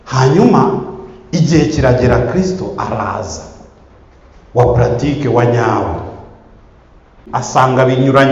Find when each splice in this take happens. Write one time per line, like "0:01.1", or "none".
0:07.2